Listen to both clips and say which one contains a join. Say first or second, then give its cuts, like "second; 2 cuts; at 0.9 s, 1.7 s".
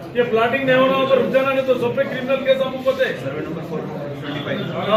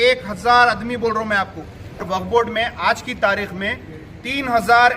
second; 1 cut; at 2.0 s